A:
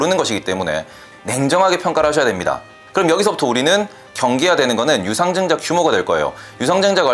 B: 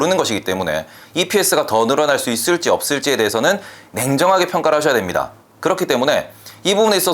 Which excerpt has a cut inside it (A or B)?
A